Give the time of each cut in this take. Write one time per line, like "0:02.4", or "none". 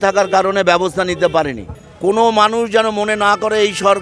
0:01.6